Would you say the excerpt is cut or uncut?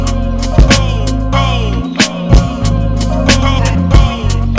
uncut